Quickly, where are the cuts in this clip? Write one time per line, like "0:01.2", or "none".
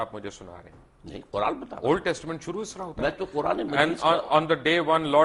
none

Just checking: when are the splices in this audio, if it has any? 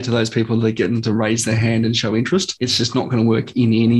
0:02.5

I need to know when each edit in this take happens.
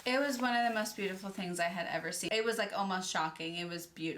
0:02.2

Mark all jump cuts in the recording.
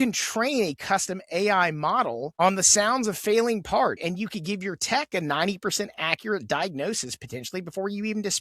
0:04.0

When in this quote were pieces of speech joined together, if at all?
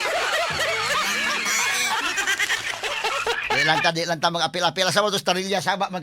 0:02.9

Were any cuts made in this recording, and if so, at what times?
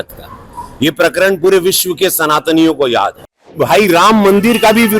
0:03.6

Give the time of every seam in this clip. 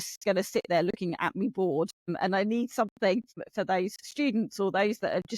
0:02.1
0:03.4

